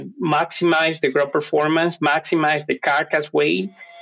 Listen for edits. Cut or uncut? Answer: uncut